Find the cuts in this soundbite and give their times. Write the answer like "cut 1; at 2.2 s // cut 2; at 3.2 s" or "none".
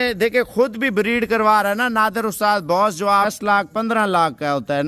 cut 1; at 3.3 s

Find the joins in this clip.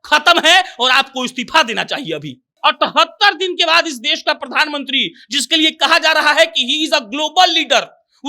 cut 1; at 2.6 s

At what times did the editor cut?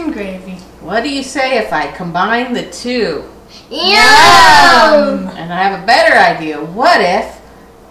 none

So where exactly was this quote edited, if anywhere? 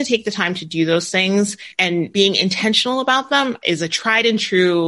cut 1; at 1.7 s // cut 2; at 3.6 s

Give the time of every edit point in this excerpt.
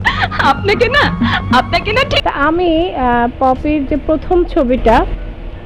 cut 1; at 2.2 s

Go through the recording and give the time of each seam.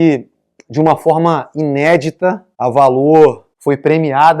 cut 1; at 2.5 s // cut 2; at 3.5 s

